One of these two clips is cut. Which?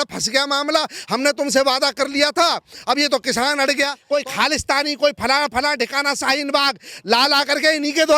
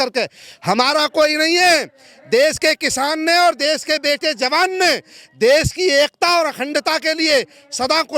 first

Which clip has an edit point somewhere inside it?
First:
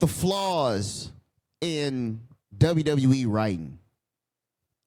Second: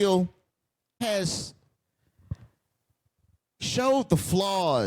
second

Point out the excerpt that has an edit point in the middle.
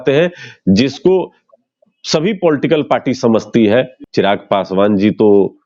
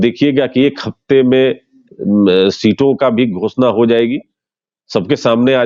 first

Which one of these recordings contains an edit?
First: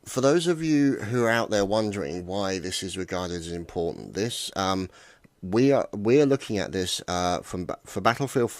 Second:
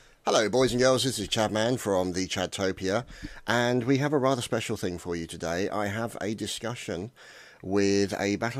first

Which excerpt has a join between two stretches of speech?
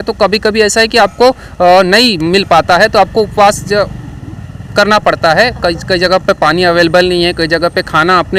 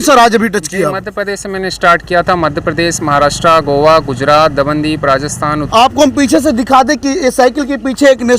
second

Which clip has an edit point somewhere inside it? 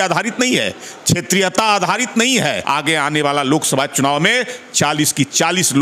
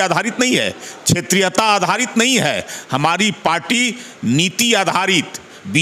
first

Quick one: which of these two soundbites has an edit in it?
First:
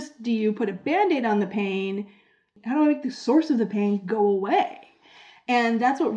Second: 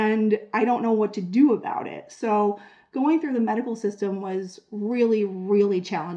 first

